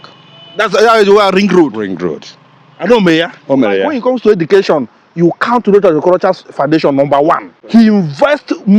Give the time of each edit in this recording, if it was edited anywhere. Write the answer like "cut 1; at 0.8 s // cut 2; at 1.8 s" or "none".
cut 1; at 3.9 s // cut 2; at 7.5 s